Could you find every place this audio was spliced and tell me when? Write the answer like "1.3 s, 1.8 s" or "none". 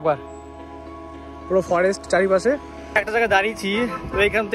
2.8 s